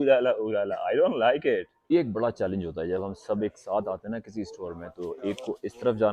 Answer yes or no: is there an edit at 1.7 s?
yes